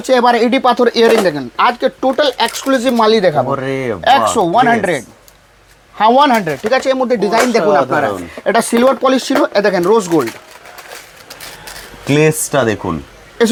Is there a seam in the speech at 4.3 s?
no; 0 cuts

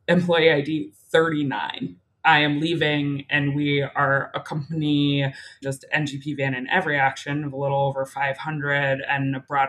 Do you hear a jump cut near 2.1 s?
yes; 1 cut; at 2.1 s

